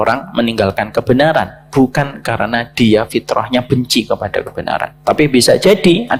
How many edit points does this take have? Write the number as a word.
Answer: zero